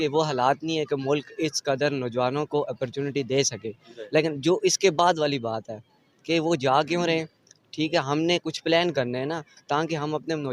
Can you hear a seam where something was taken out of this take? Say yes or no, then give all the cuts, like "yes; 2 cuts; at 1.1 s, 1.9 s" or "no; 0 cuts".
no; 0 cuts